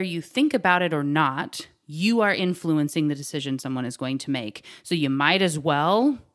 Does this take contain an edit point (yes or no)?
no